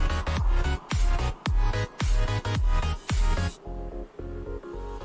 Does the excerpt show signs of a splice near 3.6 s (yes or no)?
no